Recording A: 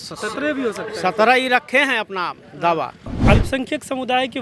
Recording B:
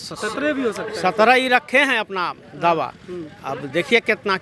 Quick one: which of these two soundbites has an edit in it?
A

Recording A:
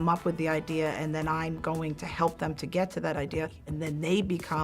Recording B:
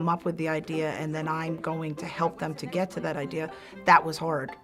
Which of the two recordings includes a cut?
A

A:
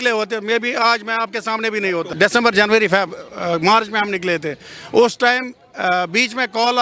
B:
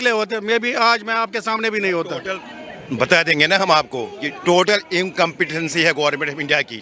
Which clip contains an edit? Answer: A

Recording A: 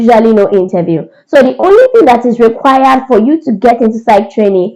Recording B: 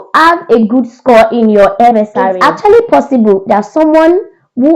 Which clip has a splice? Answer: B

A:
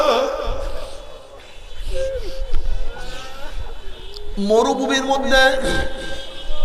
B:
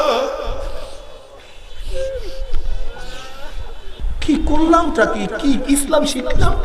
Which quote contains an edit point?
B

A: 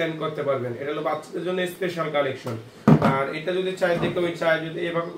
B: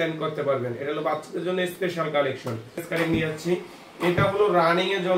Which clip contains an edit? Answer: B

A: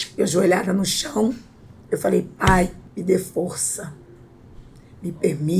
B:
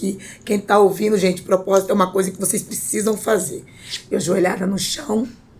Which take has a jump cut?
A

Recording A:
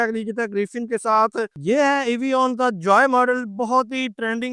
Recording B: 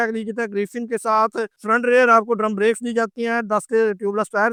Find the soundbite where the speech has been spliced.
A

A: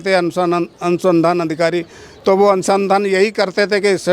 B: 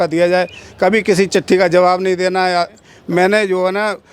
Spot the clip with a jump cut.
B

